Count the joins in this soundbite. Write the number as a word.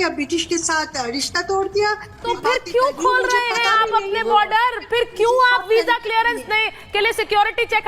one